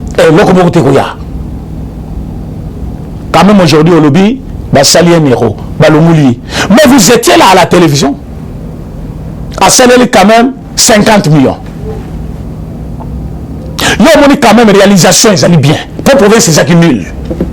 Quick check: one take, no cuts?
no; 1 cut; at 8.2 s

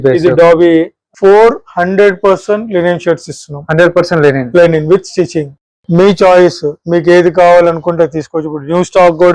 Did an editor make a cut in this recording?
yes; 1 cut; at 1.0 s

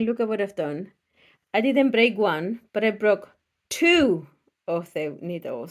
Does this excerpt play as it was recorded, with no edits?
yes; 0 cuts

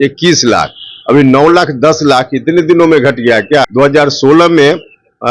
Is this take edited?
yes; 1 cut; at 3.7 s

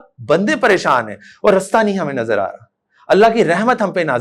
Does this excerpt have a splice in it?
no; 0 cuts

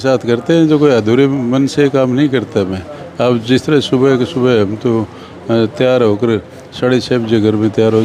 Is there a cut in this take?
no; 0 cuts

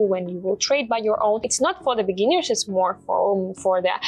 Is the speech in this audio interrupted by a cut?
yes; 1 cut; at 1.5 s

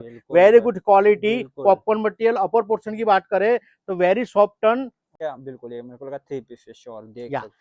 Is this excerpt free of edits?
no; 1 cut; at 5.1 s

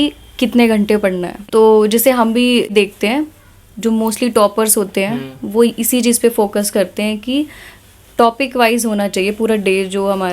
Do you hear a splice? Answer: yes; 2 cuts; at 1.4 s, 2.7 s

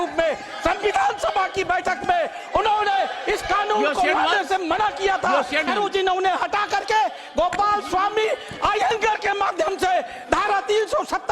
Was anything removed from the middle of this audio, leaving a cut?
yes; 1 cut; at 5.7 s

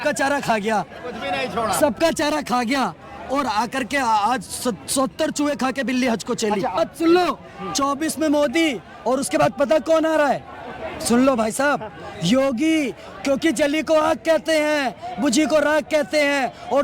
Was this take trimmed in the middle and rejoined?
yes; 1 cut; at 6.8 s

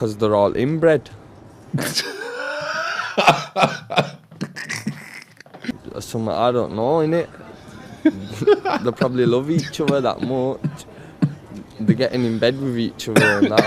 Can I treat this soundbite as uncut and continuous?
no; 1 cut; at 5.7 s

